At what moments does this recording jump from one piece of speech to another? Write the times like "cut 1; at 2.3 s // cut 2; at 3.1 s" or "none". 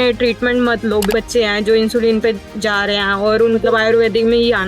cut 1; at 1.1 s // cut 2; at 3.6 s